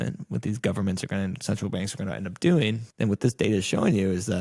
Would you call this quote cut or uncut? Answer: cut